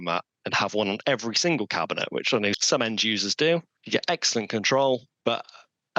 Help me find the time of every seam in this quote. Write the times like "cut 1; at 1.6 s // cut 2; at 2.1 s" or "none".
cut 1; at 2.6 s // cut 2; at 3.8 s // cut 3; at 5.1 s